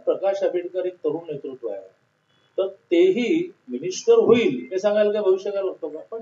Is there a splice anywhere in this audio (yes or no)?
no